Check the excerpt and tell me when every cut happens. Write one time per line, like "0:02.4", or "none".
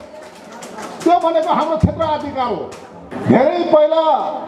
0:03.1